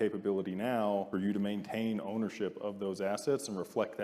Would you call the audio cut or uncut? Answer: cut